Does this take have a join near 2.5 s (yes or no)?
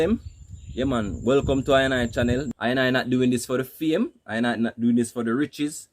yes